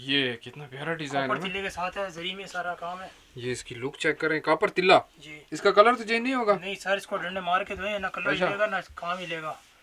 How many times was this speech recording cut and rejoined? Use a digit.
0